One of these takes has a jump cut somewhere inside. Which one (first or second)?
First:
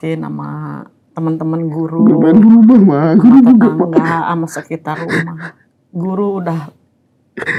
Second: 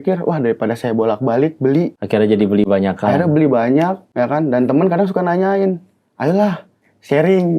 second